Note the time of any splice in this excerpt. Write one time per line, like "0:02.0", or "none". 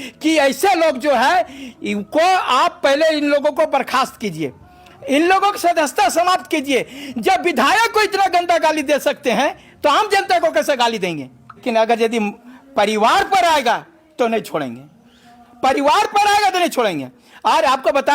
0:11.6

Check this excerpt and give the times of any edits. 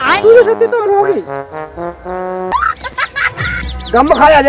0:02.5

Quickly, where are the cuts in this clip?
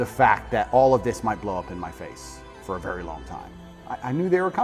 0:03.6

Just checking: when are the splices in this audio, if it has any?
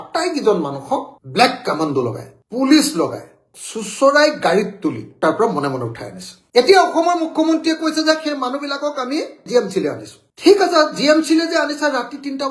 0:03.5
0:05.1

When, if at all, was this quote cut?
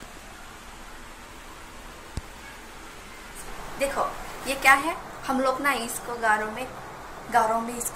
0:03.8

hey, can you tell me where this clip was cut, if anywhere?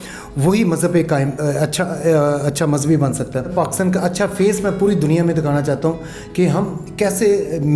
0:03.5

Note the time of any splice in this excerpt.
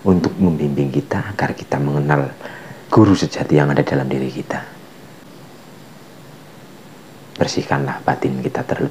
0:05.2

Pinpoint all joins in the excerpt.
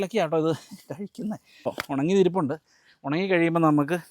0:01.8

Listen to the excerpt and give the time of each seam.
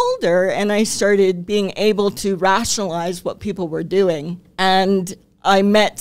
0:04.4

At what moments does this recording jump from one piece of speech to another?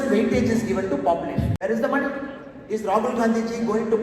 0:01.6

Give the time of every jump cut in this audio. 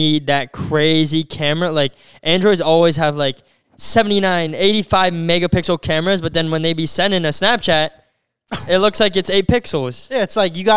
none

